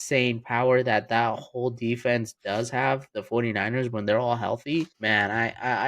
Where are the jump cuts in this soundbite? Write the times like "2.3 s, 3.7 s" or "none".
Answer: 5.0 s